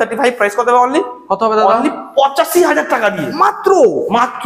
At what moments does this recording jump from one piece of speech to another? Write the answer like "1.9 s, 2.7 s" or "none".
none